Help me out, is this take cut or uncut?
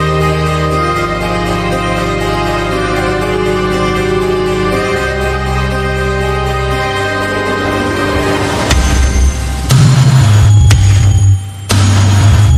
uncut